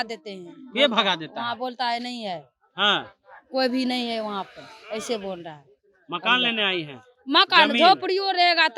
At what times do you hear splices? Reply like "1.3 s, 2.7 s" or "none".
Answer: none